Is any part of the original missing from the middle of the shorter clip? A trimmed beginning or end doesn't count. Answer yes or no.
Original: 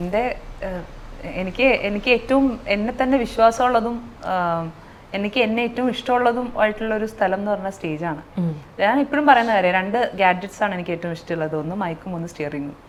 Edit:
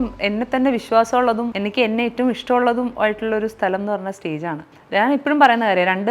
yes